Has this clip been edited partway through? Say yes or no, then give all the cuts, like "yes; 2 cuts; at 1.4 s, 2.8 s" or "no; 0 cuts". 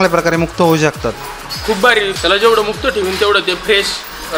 yes; 1 cut; at 2.1 s